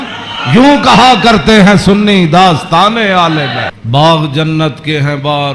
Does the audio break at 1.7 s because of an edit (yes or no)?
no